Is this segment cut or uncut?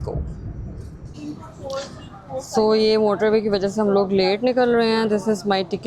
cut